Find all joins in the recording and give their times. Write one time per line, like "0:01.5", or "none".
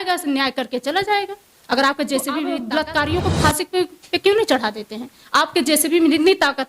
0:02.6